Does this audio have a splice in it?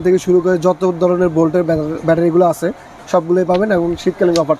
no; 0 cuts

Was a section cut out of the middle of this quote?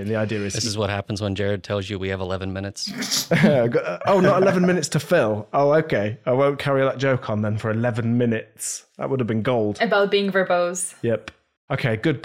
no; 0 cuts

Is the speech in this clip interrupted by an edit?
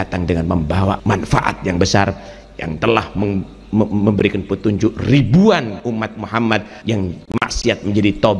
yes; 3 cuts; at 1.0 s, 5.8 s, 6.7 s

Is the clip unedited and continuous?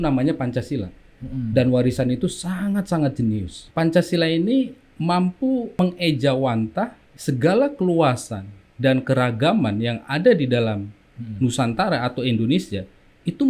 no; 4 cuts; at 3.6 s, 4.8 s, 5.8 s, 7.1 s

